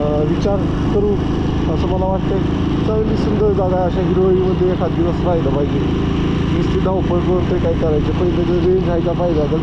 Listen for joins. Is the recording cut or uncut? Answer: uncut